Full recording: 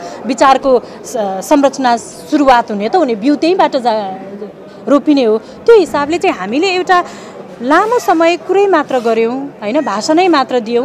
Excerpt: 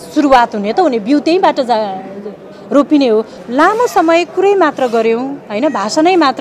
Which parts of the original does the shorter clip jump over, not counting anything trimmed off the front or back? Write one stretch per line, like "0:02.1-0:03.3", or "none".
0:05.5-0:07.5